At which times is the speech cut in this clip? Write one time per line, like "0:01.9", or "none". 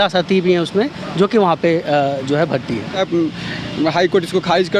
0:03.0